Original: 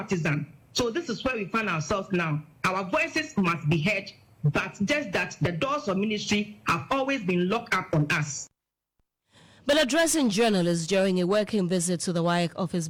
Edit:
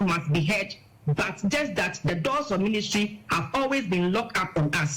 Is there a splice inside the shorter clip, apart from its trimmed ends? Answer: no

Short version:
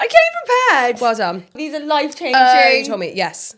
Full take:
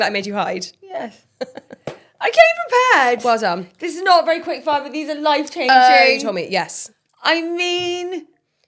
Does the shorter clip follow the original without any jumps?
no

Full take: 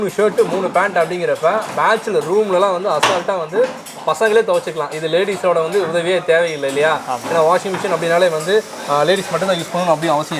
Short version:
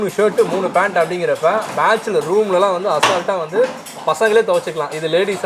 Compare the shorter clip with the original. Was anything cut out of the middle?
no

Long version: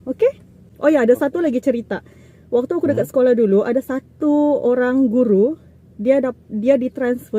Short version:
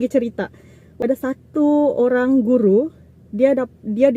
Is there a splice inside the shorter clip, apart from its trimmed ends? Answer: yes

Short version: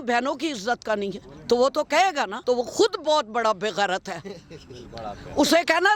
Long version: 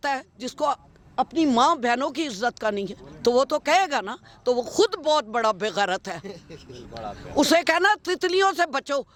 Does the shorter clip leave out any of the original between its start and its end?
yes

